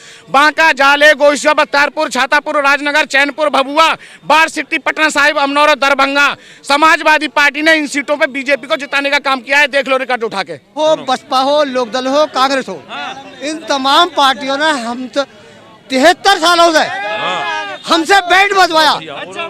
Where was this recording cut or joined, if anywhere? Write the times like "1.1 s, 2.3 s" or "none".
10.8 s